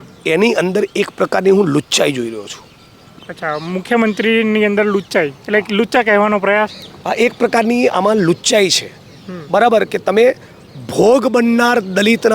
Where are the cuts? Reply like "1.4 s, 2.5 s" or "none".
none